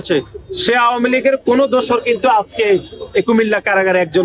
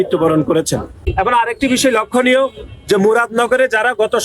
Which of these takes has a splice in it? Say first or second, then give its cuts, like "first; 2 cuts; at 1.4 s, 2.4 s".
second; 1 cut; at 1.0 s